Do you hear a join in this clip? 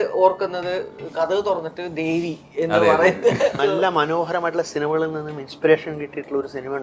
yes; 1 cut; at 3.6 s

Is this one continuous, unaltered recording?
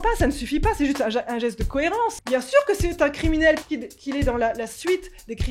no; 2 cuts; at 2.2 s, 3.6 s

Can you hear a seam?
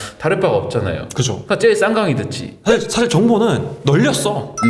no; 0 cuts

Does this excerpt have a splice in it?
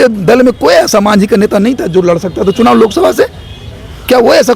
no; 0 cuts

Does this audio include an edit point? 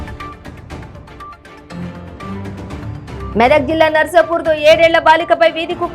no; 0 cuts

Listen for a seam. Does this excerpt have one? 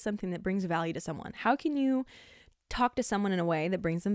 no; 0 cuts

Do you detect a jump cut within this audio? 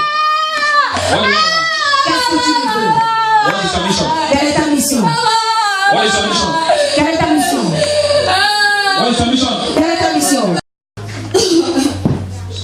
no; 0 cuts

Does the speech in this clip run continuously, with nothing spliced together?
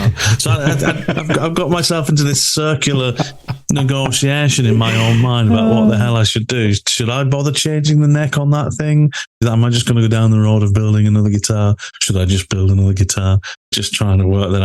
no; 2 cuts; at 9.4 s, 13.8 s

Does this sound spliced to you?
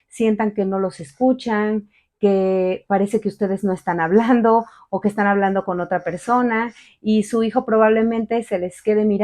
no; 0 cuts

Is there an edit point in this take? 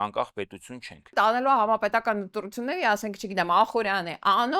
yes; 1 cut; at 1.1 s

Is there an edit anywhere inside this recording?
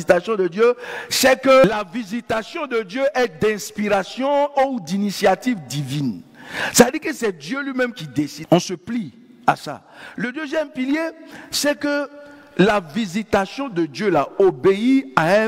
yes; 2 cuts; at 1.6 s, 8.4 s

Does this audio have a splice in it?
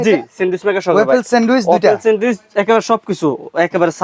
no; 0 cuts

